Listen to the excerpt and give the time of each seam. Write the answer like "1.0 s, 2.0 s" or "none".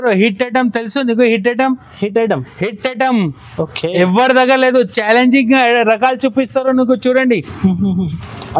none